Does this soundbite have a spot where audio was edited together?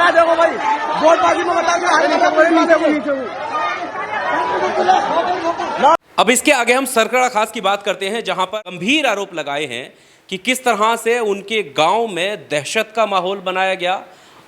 no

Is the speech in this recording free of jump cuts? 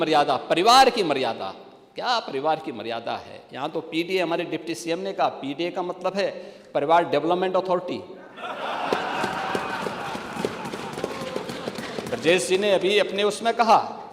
yes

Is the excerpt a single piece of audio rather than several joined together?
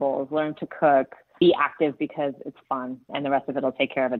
no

